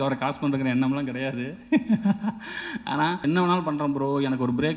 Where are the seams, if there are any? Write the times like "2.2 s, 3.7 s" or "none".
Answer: 3.2 s